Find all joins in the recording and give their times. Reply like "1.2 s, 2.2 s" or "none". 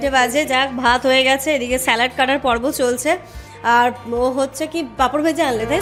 none